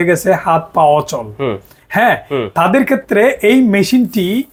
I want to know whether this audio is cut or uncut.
uncut